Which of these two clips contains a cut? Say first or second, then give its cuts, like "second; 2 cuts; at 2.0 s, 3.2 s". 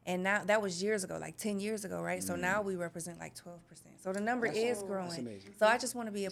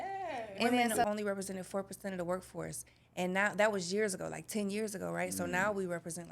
second; 1 cut; at 1.0 s